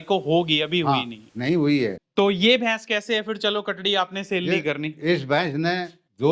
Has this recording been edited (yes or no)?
yes